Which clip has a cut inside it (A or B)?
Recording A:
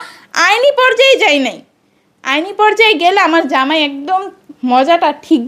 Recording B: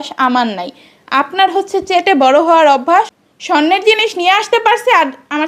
B